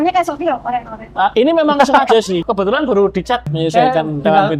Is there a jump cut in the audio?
yes; 2 cuts; at 2.4 s, 3.5 s

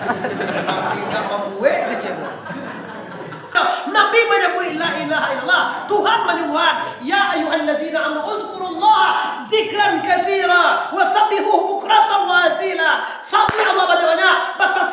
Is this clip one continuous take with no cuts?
no; 1 cut; at 3.5 s

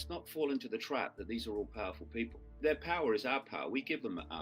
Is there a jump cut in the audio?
yes; 1 cut; at 2.4 s

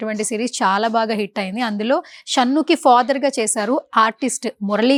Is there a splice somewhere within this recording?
no; 0 cuts

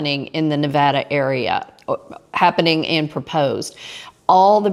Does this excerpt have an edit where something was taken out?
no; 0 cuts

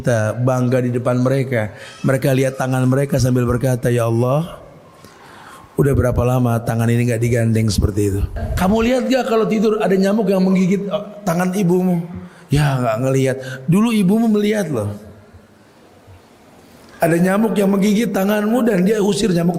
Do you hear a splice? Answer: yes; 1 cut; at 8.5 s

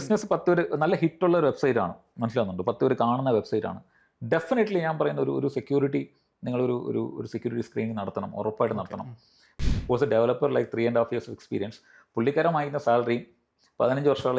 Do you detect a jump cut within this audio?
yes; 1 cut; at 9.5 s

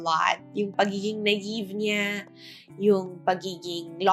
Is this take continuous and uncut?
yes; 0 cuts

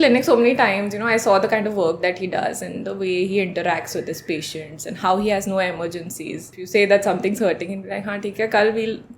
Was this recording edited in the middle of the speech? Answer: yes; 1 cut; at 6.5 s

